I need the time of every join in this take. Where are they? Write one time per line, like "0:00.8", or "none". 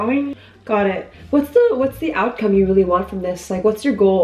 none